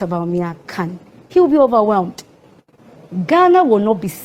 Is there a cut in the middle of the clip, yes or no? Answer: no